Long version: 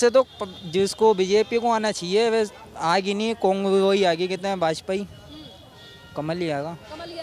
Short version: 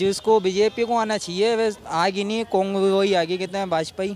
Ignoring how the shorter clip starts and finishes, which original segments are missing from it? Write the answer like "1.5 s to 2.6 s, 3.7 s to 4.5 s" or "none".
2.6 s to 2.7 s

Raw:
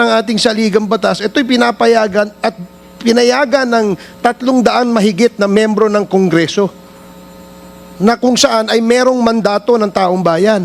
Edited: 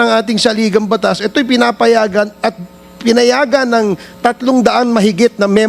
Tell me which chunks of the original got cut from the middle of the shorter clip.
none

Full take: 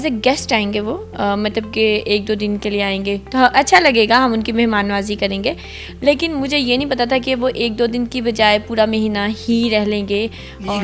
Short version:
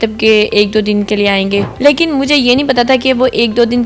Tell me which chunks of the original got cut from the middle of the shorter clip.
3.2 s to 5.9 s

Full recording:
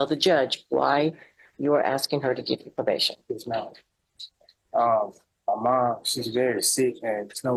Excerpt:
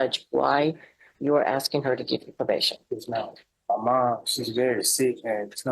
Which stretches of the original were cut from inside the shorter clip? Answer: 3.8 s to 5.3 s

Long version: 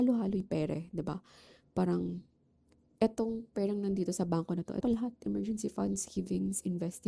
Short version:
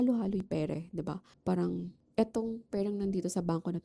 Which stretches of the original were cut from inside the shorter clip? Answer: 1.3 s to 1.6 s, 2.3 s to 2.8 s

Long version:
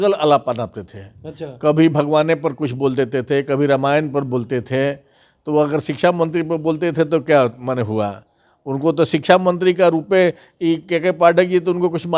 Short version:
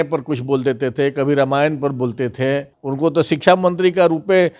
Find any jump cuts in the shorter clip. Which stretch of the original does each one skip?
5.1 s to 8.6 s

